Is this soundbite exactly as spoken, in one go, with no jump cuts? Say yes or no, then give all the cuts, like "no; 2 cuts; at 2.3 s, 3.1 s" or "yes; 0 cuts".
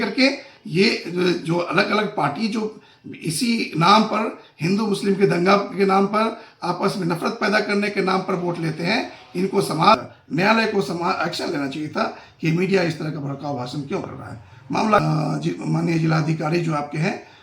no; 2 cuts; at 10.0 s, 15.0 s